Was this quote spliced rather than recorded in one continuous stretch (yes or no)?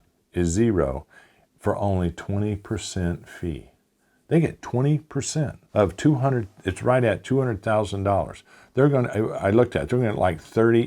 yes